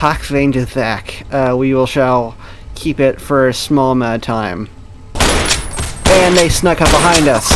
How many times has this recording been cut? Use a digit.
1